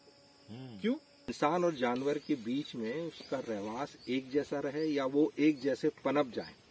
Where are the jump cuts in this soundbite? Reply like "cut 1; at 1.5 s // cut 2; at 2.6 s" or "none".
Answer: cut 1; at 1.3 s